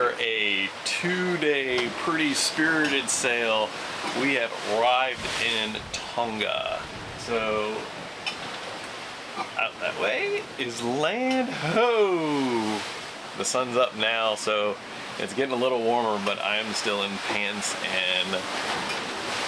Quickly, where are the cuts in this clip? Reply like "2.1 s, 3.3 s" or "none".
none